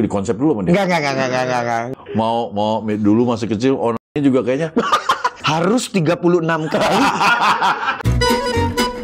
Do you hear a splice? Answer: yes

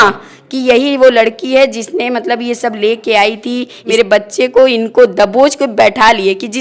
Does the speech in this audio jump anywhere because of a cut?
yes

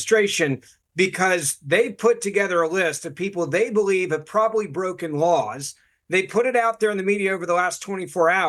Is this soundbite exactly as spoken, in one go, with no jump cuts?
yes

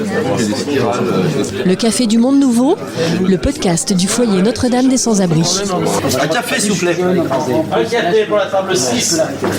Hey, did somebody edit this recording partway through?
no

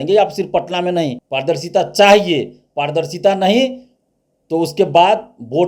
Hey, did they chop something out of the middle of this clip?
yes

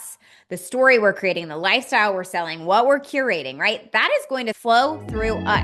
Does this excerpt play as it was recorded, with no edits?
no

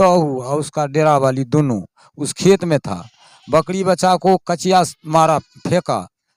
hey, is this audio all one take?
yes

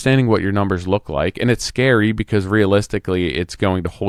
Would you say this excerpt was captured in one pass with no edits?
yes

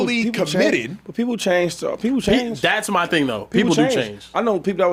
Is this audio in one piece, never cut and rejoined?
yes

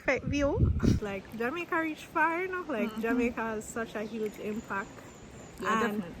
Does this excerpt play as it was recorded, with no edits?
no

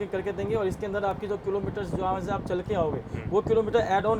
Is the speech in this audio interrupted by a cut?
no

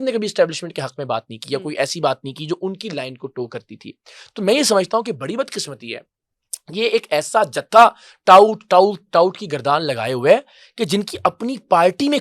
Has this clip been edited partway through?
no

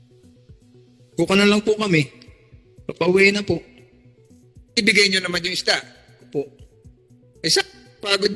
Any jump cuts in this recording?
yes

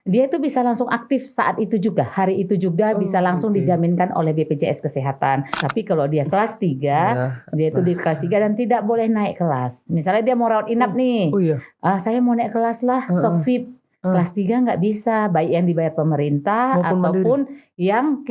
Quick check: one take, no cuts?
no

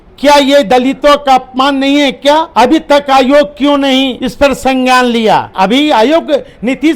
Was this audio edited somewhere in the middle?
yes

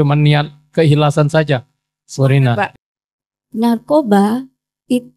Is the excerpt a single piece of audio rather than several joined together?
no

